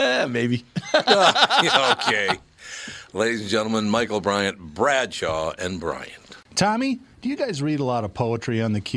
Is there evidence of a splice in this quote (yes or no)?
yes